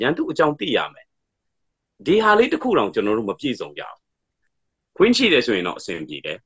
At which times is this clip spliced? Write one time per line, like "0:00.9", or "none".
0:04.5